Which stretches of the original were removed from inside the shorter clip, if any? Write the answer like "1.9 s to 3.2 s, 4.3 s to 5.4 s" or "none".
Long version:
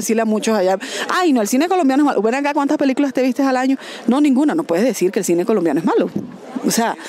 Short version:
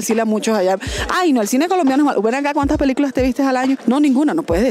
3.8 s to 4.0 s